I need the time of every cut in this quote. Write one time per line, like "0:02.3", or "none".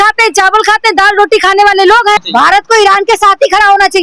0:02.2